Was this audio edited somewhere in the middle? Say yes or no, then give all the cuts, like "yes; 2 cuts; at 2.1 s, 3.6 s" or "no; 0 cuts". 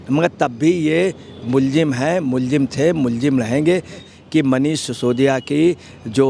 yes; 1 cut; at 4.1 s